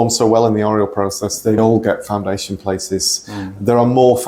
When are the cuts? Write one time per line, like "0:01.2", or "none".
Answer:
none